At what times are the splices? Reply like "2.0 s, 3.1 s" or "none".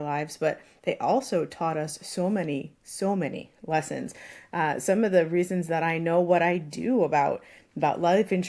none

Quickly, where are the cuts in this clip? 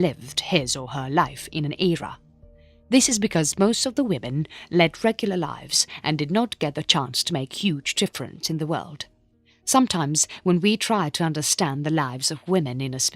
6.2 s

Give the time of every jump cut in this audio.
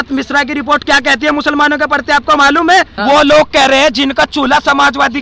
2.9 s

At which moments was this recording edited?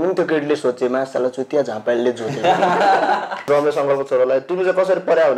3.5 s

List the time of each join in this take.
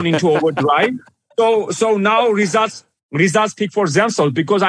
none

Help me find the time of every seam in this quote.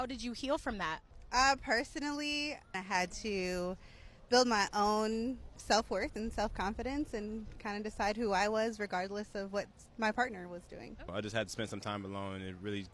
none

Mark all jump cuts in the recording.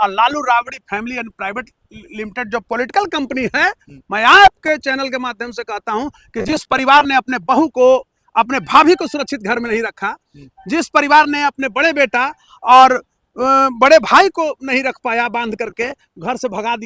none

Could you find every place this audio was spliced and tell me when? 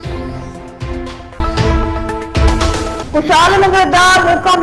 none

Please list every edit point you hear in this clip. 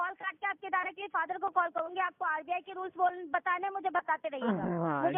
none

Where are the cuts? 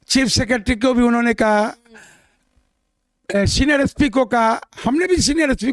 none

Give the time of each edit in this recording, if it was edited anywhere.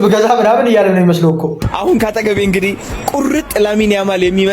1.6 s

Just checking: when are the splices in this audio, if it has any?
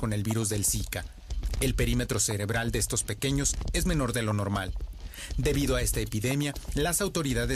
3.6 s

